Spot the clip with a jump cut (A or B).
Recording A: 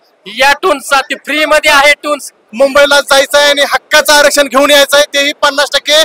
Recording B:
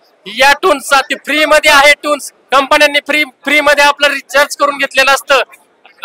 A